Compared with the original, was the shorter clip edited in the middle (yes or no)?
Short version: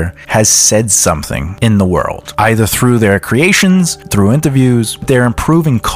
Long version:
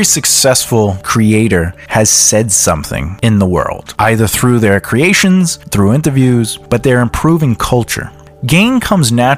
yes